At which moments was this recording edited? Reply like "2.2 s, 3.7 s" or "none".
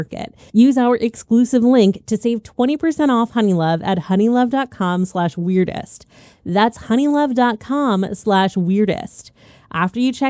none